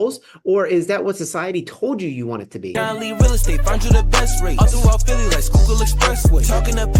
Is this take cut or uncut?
cut